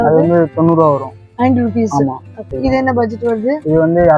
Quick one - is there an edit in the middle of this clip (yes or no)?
yes